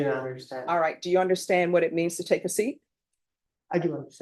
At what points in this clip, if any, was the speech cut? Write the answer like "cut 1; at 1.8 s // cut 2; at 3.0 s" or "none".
none